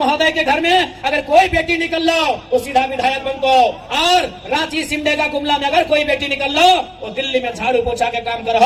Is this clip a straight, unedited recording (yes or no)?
yes